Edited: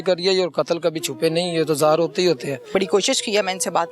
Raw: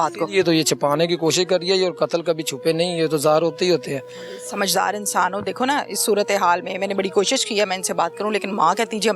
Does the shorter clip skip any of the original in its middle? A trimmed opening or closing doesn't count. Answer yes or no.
yes